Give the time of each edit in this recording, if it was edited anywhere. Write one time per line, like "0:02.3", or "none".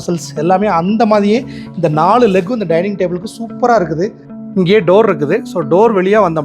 0:04.4